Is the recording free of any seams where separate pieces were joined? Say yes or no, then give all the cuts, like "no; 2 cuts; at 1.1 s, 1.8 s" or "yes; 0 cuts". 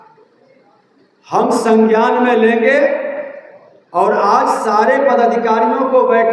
yes; 0 cuts